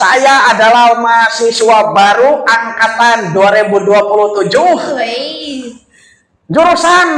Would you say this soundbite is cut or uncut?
uncut